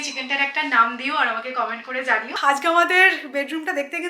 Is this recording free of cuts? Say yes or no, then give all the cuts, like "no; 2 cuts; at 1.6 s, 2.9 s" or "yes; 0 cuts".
no; 1 cut; at 2.4 s